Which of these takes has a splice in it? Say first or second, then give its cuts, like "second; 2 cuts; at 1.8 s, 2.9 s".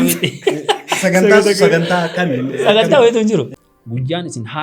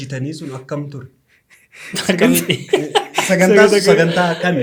first; 1 cut; at 3.5 s